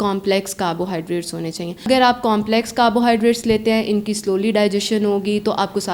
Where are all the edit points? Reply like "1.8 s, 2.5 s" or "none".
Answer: 1.9 s